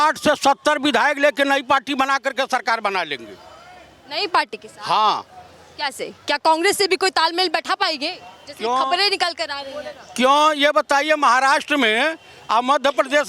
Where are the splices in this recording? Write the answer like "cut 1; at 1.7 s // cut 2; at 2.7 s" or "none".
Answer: none